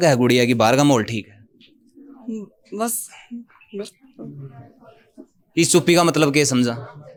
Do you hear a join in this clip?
no; 0 cuts

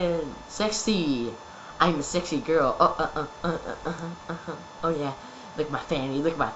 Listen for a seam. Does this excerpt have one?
yes; 1 cut; at 5.5 s

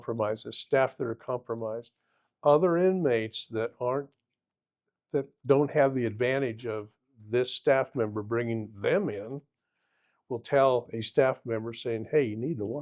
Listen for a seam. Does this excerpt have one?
no; 0 cuts

